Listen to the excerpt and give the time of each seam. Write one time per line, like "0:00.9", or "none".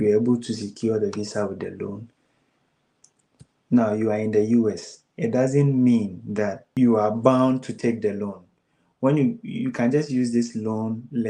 0:06.6